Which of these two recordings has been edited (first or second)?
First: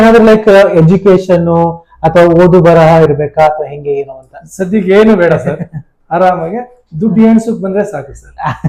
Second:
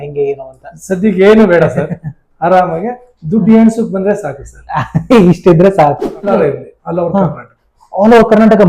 second